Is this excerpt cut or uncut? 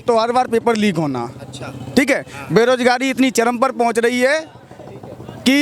uncut